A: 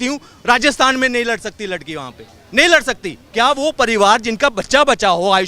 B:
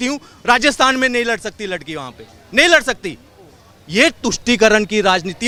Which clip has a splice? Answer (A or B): A